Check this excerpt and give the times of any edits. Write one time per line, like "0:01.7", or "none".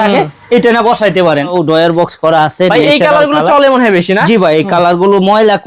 0:01.5